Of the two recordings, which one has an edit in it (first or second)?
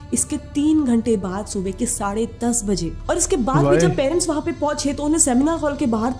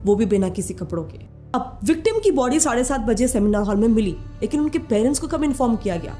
second